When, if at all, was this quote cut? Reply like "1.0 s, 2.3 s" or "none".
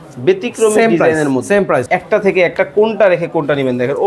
1.8 s

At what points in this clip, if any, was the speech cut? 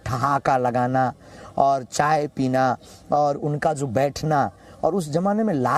none

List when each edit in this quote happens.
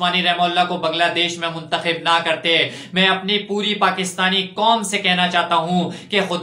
none

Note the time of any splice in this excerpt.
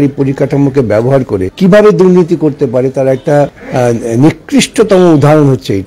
1.5 s, 3.6 s

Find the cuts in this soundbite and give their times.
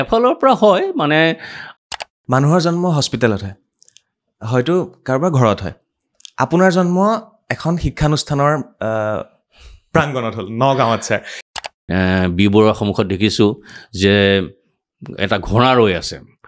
1.8 s, 11.4 s

